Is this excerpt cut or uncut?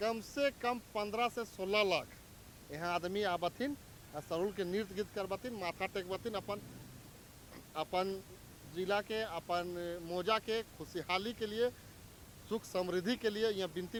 uncut